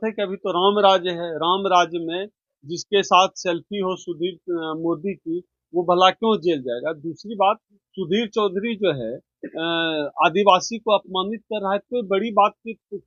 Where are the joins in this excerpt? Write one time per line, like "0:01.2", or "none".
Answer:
none